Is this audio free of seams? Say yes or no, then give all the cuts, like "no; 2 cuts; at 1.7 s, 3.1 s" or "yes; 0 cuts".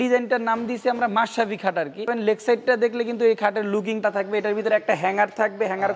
no; 2 cuts; at 2.1 s, 4.0 s